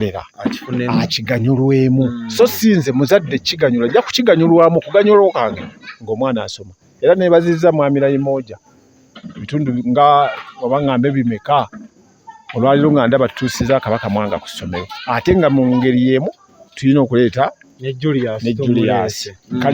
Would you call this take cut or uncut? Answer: uncut